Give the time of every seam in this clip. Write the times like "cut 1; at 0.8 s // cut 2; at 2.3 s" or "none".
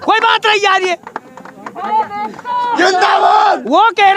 none